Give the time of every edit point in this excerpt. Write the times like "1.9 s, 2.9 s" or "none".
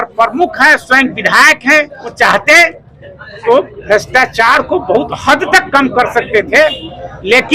2.1 s